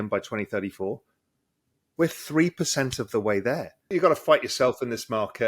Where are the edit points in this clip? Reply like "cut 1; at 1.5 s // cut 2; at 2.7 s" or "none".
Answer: cut 1; at 3.9 s